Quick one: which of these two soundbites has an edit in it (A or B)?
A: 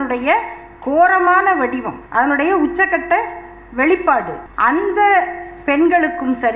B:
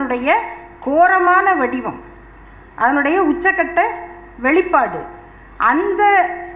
A